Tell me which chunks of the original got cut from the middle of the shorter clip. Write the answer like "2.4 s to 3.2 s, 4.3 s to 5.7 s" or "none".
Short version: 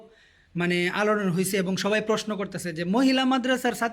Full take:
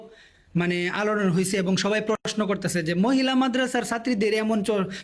2.2 s to 2.4 s